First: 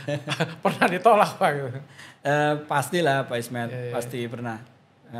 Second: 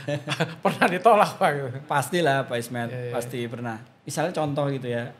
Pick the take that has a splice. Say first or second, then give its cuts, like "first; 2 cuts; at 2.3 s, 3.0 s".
second; 2 cuts; at 1.8 s, 3.9 s